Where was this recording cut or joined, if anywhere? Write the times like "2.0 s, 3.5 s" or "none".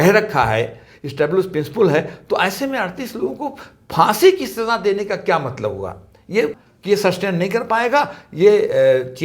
6.7 s